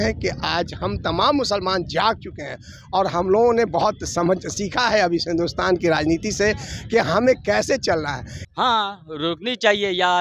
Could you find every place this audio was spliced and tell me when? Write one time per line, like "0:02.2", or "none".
0:08.4